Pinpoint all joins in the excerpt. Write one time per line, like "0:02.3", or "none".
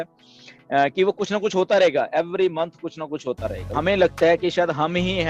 0:03.7